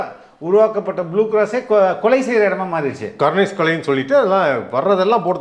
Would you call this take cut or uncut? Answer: uncut